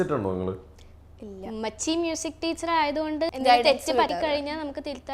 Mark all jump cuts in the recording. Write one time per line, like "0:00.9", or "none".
0:03.3
0:04.1